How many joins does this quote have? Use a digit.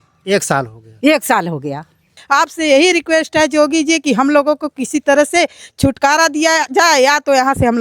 1